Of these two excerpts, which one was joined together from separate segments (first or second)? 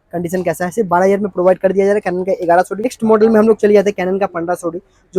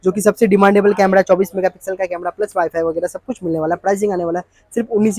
first